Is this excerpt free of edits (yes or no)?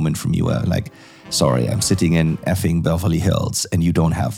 yes